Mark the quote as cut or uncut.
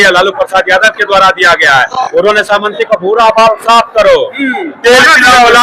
uncut